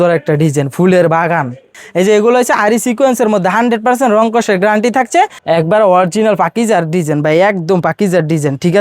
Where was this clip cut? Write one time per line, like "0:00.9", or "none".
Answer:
0:01.8
0:05.4